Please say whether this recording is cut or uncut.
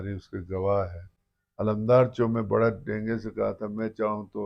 cut